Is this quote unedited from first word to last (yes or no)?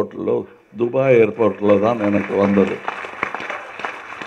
yes